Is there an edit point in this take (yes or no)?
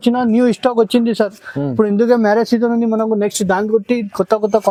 no